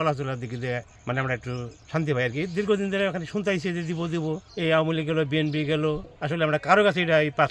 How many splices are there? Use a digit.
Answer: 4